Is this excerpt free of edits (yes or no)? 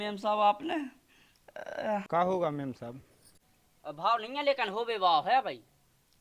no